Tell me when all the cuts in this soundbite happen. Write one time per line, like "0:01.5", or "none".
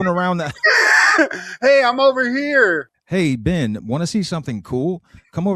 0:02.9